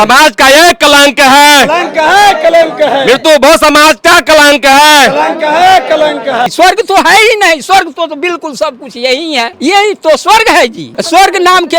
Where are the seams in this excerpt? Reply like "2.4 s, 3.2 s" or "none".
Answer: 6.5 s, 9.5 s, 10.9 s